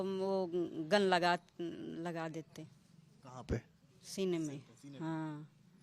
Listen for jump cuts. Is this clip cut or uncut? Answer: uncut